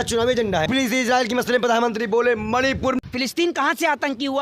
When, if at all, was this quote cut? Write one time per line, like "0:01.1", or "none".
0:03.0